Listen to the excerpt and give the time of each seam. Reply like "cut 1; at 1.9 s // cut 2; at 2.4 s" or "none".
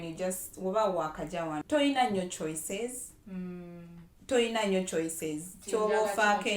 cut 1; at 1.6 s